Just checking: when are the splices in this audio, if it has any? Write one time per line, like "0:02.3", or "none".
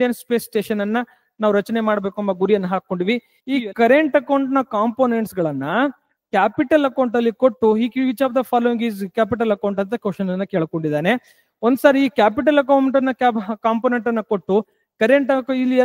0:03.3